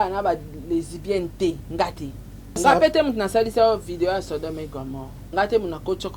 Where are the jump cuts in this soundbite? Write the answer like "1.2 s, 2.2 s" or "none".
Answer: 2.6 s, 5.1 s

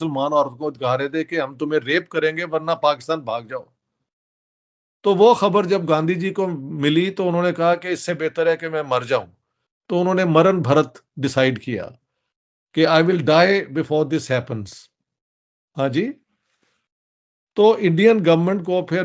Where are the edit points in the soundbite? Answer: none

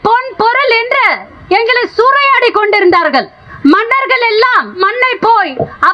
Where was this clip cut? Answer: 1.3 s, 3.4 s, 4.8 s

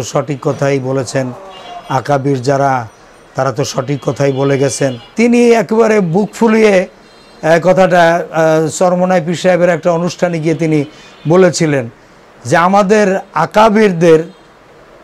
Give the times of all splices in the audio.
5.0 s

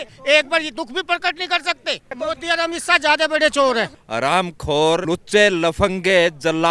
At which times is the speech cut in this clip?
2.2 s, 4.0 s, 5.0 s

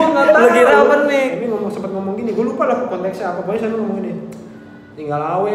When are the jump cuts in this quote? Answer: 1.2 s

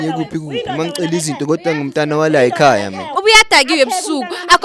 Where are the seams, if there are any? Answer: 3.2 s

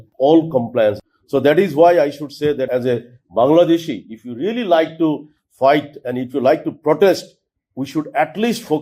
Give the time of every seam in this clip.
1.0 s, 2.7 s

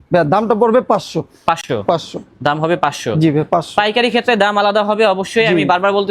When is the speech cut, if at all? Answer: none

